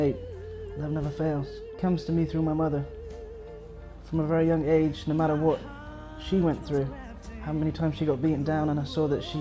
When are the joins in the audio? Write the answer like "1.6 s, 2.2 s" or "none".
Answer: 1.8 s